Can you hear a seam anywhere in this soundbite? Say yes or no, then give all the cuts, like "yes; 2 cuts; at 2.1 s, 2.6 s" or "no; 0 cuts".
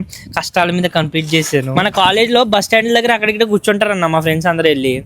yes; 1 cut; at 1.7 s